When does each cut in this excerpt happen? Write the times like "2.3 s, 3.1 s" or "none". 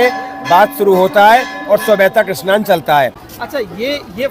3.3 s